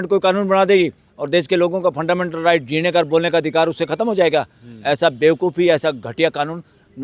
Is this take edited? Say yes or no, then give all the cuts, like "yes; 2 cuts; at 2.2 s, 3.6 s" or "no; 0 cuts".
no; 0 cuts